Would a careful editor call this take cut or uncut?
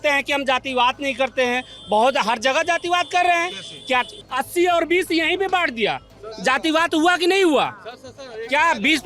cut